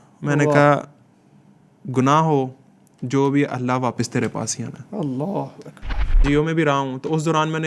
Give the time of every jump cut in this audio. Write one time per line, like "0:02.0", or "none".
0:06.2